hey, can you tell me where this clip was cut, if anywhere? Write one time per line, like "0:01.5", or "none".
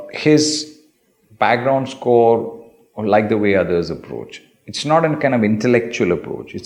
none